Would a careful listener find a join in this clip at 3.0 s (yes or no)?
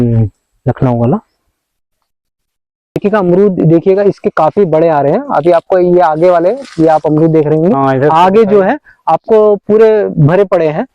yes